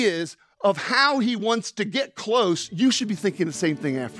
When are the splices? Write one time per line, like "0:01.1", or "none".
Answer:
none